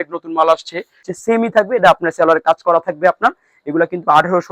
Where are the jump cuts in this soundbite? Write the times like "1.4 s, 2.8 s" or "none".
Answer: 1.1 s